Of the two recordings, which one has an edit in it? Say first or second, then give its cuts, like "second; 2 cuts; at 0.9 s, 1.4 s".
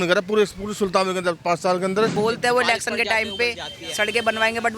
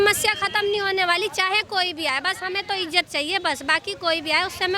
first; 1 cut; at 2.1 s